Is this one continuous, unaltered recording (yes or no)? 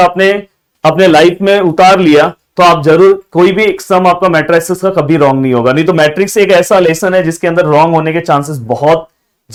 yes